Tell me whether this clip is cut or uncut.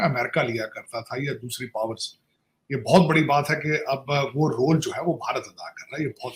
uncut